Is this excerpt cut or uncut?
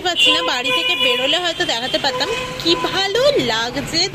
uncut